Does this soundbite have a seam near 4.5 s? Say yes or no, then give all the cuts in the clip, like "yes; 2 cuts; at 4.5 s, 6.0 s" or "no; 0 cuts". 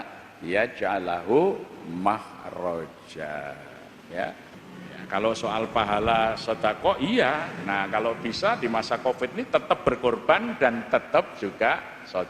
yes; 1 cut; at 4.5 s